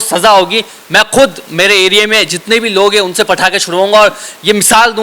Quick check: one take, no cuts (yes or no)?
yes